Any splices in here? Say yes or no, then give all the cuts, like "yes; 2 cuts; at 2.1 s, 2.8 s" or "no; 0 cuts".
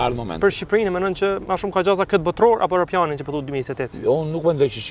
no; 0 cuts